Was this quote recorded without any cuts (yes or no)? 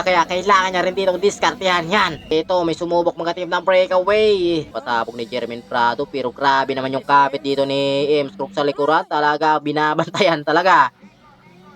no